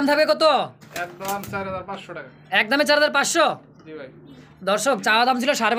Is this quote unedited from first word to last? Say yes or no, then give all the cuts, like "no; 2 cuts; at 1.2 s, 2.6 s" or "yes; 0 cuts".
yes; 0 cuts